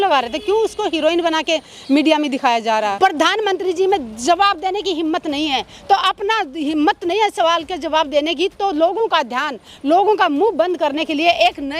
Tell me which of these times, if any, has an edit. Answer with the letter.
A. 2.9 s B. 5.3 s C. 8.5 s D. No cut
A